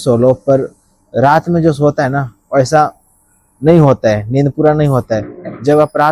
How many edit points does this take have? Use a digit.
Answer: 0